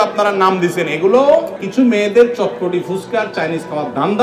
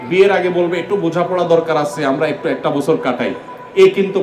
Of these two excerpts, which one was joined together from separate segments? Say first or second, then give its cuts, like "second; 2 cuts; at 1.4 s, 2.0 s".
first; 1 cut; at 1.6 s